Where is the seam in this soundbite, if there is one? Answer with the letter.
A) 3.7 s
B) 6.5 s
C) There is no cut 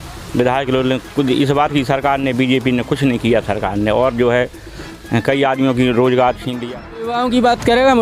B